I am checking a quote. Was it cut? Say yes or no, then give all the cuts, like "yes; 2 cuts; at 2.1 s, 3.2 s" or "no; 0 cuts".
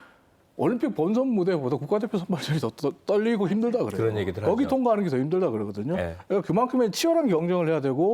no; 0 cuts